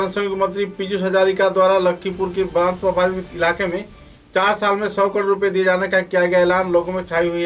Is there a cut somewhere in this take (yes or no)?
no